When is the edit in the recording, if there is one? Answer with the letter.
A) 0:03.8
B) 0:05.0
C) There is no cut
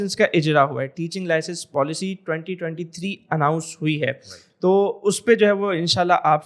C